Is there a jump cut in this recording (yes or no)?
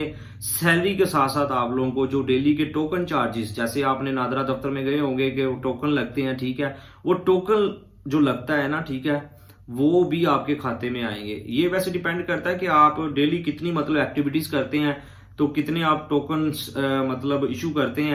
no